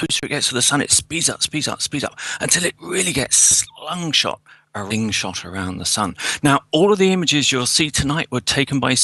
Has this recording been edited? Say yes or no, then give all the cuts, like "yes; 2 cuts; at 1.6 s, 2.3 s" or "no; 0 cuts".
no; 0 cuts